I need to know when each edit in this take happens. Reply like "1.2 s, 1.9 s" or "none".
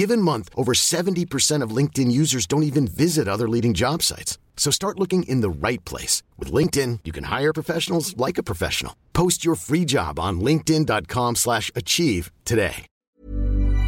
12.9 s